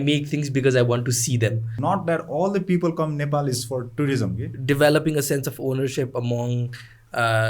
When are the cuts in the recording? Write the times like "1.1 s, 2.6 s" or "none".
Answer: 1.8 s, 4.5 s

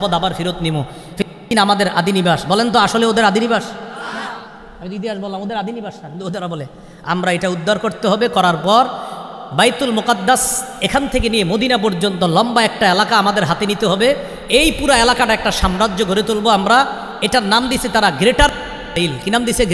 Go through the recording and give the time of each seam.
none

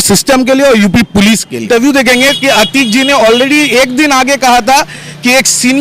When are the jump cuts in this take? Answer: 1.6 s

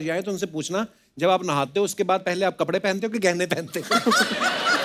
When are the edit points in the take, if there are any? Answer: none

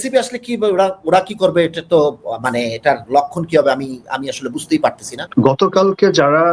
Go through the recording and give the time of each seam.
5.1 s

